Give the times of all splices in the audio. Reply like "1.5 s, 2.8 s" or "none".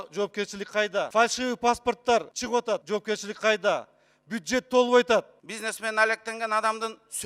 1.1 s, 2.7 s, 5.4 s